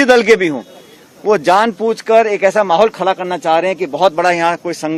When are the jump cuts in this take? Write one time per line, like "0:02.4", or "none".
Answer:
none